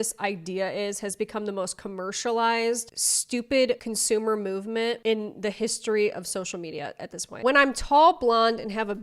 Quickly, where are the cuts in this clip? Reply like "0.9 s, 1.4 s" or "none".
3.9 s, 7.3 s